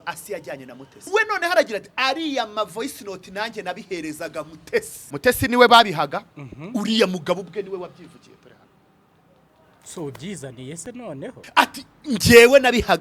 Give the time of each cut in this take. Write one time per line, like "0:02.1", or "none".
0:01.1
0:05.0
0:11.4